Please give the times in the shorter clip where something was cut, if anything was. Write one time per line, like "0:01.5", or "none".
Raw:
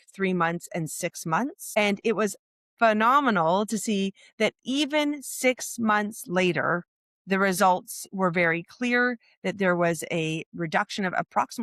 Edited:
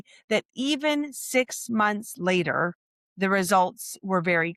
none